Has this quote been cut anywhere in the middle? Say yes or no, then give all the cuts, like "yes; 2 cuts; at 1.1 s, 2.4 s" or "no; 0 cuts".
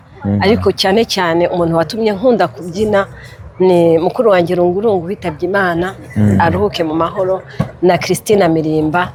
no; 0 cuts